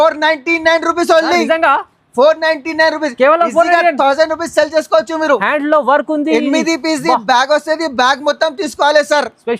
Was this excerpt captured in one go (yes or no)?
yes